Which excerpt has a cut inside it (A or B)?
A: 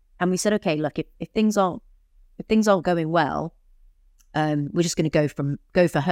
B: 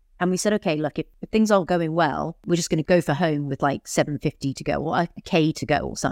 B